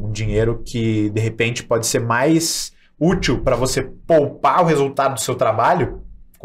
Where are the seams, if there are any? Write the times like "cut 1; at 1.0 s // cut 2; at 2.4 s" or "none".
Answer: none